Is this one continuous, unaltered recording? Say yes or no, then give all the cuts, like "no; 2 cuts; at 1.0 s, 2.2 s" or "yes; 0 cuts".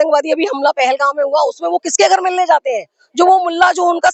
yes; 0 cuts